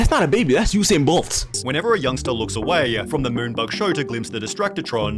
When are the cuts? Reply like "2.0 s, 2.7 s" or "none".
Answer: 1.4 s